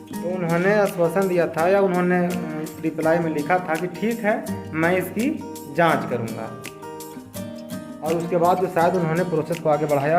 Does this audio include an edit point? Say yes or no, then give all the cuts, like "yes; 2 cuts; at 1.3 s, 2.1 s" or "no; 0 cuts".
yes; 2 cuts; at 6.7 s, 8.0 s